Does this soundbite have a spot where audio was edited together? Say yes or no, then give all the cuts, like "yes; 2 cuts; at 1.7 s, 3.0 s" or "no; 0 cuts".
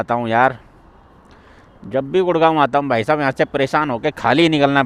no; 0 cuts